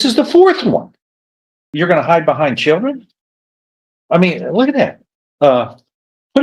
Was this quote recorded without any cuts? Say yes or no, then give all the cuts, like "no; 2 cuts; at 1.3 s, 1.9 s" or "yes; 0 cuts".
no; 1 cut; at 1.7 s